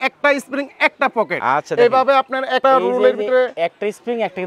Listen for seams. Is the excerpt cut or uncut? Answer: cut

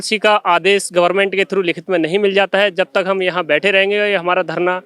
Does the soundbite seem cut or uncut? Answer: uncut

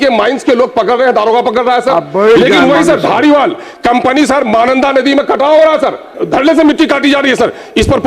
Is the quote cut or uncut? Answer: cut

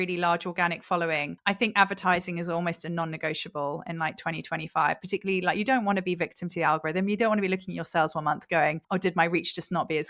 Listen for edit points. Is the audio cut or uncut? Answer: cut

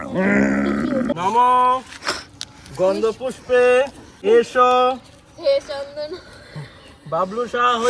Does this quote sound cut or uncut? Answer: cut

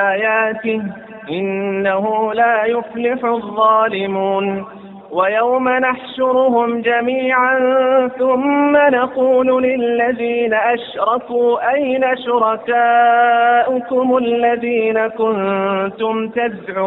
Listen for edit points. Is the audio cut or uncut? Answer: uncut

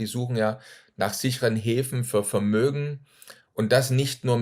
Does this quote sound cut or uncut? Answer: uncut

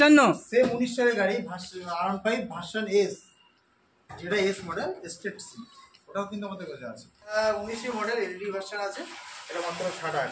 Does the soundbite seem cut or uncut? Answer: cut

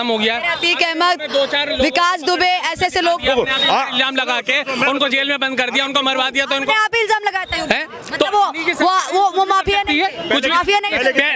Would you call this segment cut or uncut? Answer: uncut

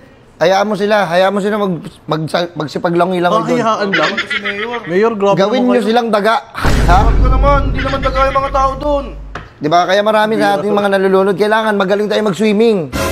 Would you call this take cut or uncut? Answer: uncut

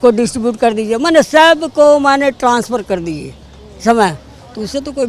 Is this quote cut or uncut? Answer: uncut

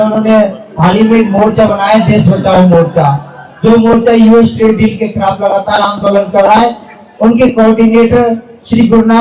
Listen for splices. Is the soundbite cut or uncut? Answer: uncut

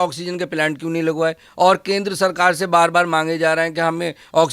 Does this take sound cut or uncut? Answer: uncut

